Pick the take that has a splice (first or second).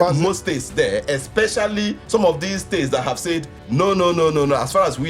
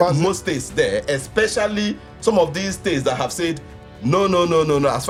first